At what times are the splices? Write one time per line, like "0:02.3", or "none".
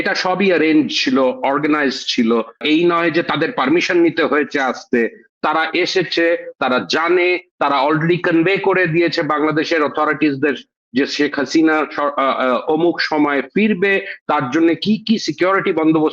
0:02.6